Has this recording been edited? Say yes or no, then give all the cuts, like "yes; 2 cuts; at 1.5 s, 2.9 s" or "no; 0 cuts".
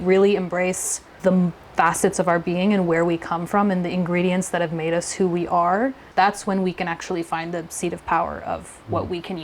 yes; 2 cuts; at 1.1 s, 6.0 s